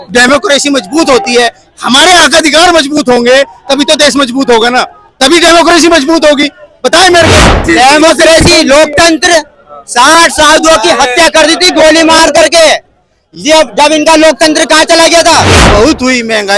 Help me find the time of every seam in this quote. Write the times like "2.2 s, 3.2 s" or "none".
7.6 s, 15.6 s